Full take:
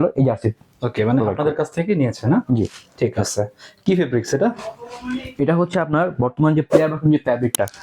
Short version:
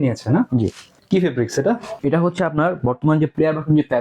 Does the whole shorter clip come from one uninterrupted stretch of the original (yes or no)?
no